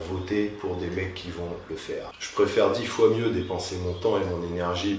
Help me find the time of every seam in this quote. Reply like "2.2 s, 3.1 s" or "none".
2.2 s